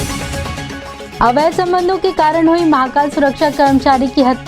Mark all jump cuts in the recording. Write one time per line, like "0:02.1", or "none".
0:01.1